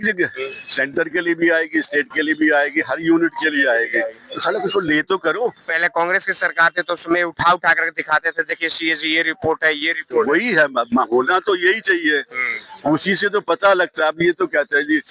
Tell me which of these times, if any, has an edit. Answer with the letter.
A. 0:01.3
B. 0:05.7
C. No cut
C